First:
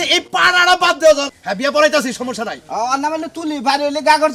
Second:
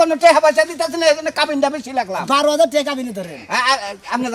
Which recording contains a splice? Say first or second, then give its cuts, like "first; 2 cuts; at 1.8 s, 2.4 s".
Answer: first; 1 cut; at 1.3 s